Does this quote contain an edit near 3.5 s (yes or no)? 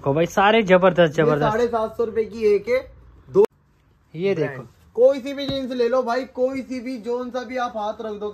yes